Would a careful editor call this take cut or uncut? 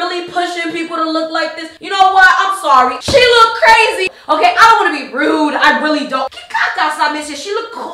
cut